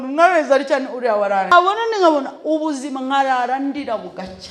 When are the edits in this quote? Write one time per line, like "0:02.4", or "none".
0:01.5